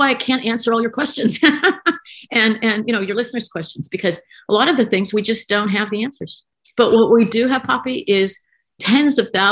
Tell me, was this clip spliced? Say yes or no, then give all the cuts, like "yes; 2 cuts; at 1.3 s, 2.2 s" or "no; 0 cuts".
no; 0 cuts